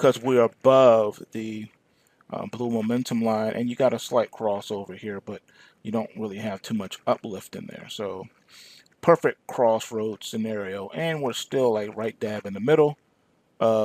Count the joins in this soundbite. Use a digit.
1